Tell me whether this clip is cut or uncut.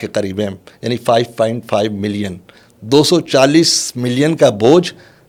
uncut